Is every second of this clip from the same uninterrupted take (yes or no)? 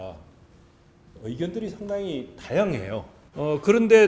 no